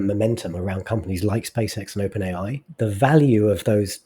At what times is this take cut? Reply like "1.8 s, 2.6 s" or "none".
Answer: 2.7 s